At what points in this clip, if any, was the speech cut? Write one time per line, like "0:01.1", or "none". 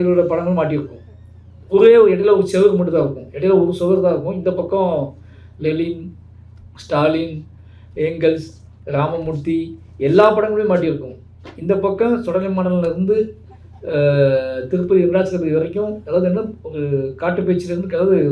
none

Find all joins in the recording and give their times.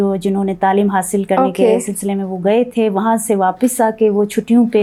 none

